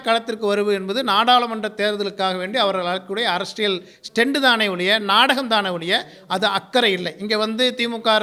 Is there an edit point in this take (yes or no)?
no